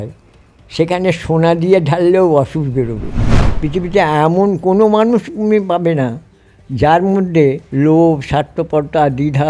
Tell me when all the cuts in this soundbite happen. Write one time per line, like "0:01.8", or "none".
0:03.4
0:07.6